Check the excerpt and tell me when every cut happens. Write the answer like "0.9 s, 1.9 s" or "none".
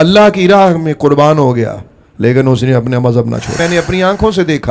3.6 s